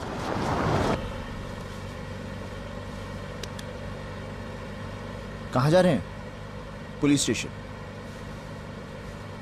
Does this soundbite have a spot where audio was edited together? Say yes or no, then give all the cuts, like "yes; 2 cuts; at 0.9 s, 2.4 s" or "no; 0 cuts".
yes; 1 cut; at 0.9 s